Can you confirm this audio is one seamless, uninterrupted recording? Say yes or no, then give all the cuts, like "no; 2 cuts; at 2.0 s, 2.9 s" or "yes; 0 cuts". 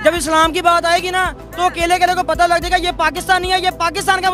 yes; 0 cuts